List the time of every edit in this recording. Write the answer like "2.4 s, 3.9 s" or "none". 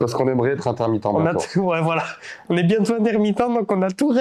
none